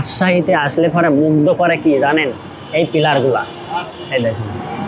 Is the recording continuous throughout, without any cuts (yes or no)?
yes